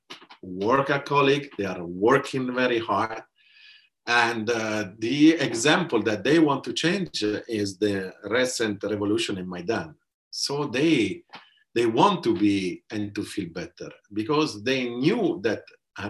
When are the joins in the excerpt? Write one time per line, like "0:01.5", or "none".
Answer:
none